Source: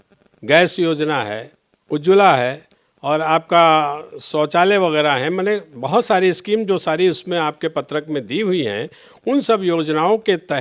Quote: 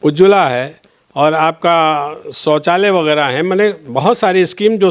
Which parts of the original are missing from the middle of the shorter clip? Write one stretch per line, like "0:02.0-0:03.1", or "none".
none